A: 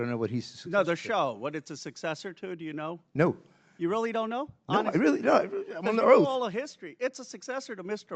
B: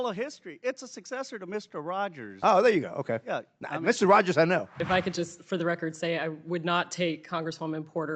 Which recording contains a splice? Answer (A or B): B